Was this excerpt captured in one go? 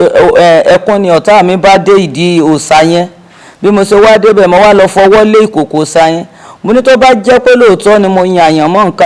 yes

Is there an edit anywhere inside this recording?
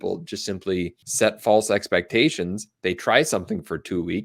yes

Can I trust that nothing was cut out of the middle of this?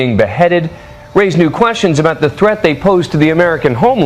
yes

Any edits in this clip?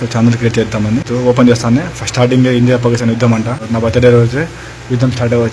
yes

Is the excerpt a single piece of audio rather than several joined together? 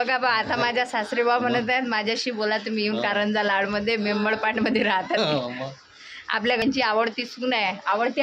no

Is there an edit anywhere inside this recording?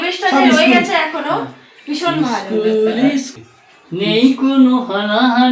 yes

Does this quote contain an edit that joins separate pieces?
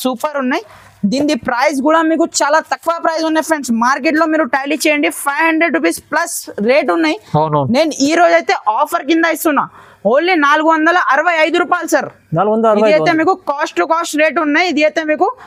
no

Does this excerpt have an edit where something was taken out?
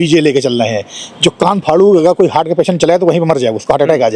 no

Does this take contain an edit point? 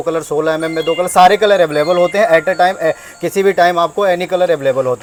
no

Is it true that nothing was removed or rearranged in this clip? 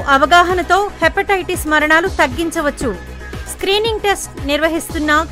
yes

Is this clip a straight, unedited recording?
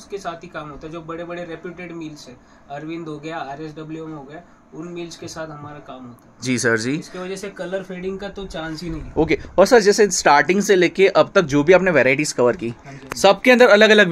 yes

